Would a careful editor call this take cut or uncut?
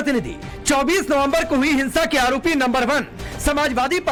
uncut